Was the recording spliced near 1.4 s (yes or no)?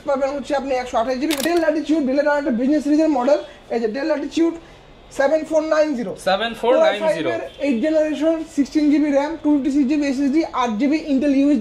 yes